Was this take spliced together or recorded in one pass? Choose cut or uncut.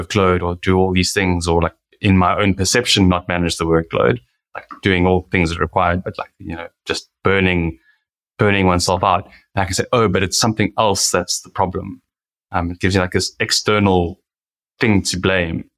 uncut